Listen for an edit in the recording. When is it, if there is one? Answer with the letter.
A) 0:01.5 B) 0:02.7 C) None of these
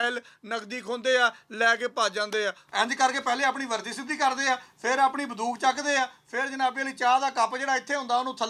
B